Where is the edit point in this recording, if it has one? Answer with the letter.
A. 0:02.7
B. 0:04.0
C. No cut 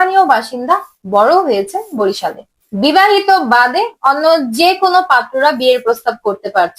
A